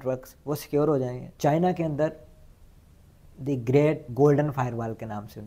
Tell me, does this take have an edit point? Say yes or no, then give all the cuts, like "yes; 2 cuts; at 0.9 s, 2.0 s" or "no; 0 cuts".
yes; 2 cuts; at 1.2 s, 4.1 s